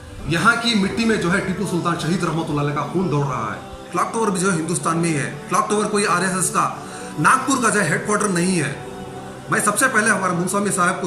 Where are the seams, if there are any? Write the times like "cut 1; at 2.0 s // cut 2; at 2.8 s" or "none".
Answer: cut 1; at 3.8 s